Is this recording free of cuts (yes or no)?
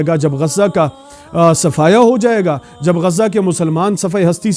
yes